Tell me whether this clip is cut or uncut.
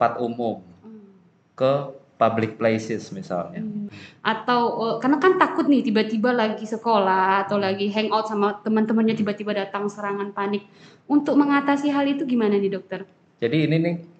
cut